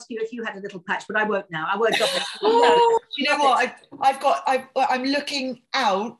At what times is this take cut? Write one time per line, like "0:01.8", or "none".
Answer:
none